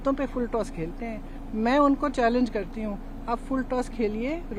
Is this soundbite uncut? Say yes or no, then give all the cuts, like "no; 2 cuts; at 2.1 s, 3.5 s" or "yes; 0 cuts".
yes; 0 cuts